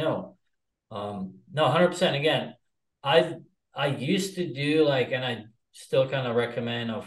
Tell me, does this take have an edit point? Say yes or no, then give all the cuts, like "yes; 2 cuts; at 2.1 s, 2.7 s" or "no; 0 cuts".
no; 0 cuts